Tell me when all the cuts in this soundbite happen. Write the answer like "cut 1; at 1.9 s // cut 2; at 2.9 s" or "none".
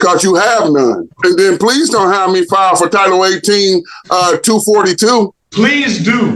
cut 1; at 1.1 s // cut 2; at 5.4 s